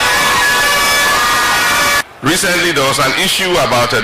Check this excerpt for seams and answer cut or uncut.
cut